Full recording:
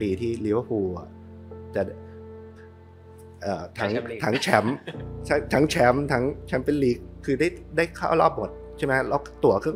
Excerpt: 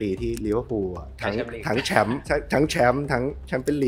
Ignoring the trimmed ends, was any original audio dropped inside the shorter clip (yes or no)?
yes